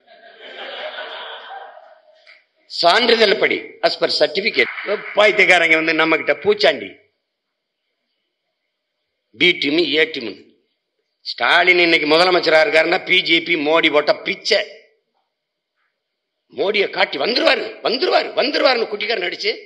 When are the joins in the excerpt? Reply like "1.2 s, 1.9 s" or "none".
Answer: 4.8 s

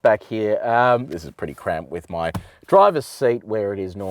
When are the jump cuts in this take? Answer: 1.1 s

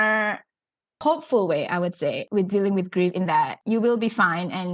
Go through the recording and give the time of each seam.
1.0 s, 2.2 s, 3.6 s

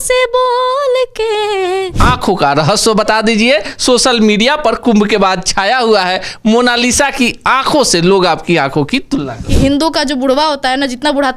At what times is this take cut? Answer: 2.0 s, 9.5 s

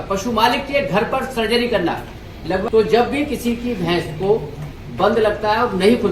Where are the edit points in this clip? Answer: 2.6 s

